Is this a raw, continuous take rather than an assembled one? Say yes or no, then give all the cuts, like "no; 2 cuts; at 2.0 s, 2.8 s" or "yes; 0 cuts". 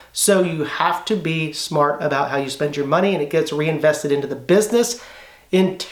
yes; 0 cuts